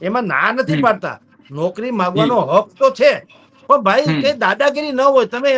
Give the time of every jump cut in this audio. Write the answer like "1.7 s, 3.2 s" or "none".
none